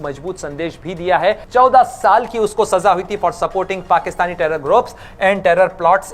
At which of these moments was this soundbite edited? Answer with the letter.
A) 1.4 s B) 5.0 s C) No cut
A